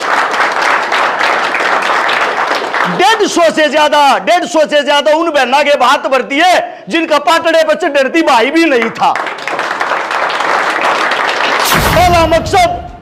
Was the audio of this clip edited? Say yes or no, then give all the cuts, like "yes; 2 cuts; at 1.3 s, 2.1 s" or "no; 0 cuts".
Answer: yes; 1 cut; at 11.9 s